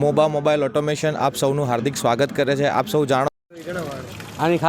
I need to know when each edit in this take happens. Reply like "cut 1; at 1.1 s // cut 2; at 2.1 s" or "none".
cut 1; at 3.3 s